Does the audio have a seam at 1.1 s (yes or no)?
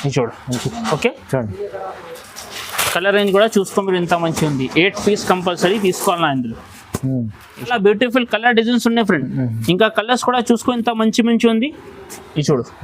no